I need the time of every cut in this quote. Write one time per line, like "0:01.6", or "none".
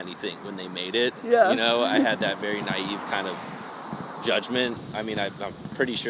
0:04.8